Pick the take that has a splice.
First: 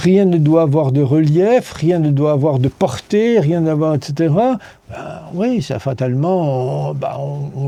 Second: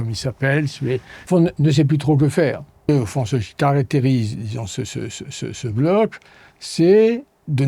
second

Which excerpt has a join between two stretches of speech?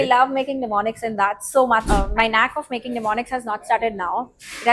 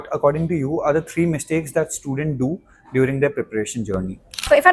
first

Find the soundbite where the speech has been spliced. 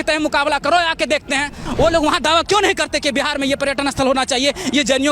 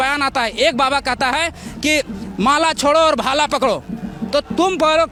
first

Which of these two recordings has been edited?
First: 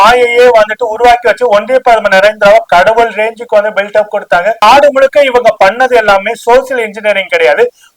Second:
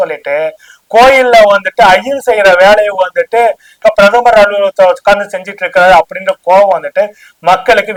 first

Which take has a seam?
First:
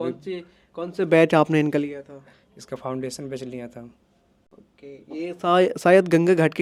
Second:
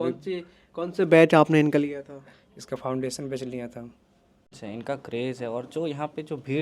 second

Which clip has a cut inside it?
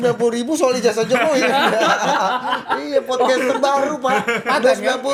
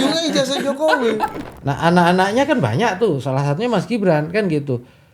second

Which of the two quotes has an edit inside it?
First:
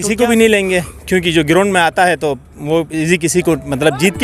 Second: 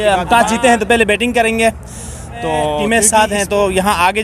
second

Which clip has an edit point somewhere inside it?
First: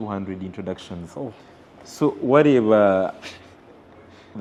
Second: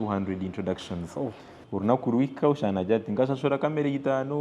second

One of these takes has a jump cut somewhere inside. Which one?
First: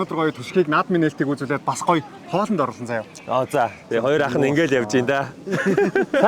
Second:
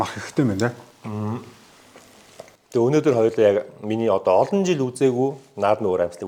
first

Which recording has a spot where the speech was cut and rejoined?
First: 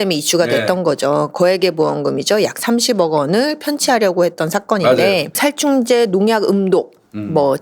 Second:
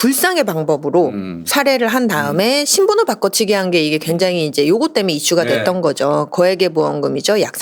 first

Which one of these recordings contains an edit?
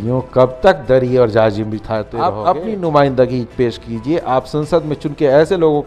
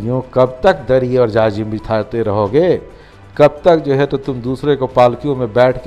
first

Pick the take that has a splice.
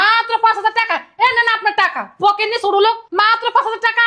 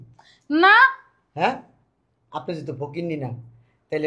first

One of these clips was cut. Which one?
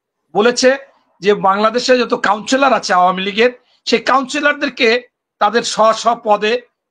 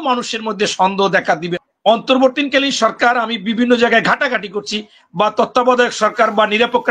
second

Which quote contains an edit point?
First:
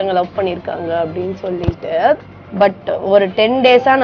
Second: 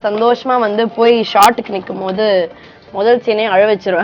first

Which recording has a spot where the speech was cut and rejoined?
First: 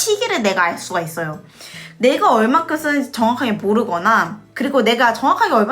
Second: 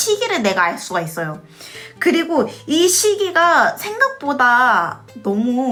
first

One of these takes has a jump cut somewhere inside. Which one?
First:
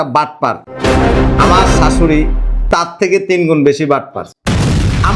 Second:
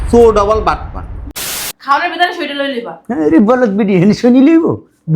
second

